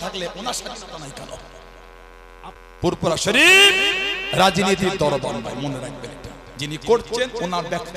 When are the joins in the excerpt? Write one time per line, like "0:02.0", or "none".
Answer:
0:02.6